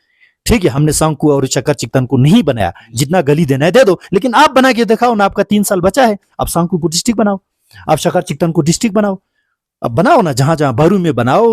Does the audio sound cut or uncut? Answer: cut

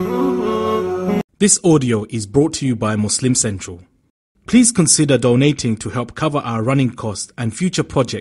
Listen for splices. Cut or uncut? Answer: cut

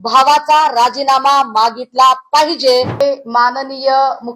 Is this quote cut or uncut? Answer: cut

